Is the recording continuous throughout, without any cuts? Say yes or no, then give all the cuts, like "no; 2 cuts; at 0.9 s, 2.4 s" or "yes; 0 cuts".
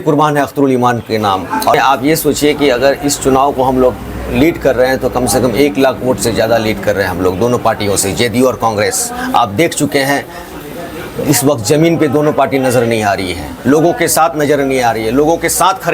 no; 1 cut; at 1.7 s